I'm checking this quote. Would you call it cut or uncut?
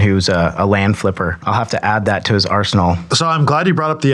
cut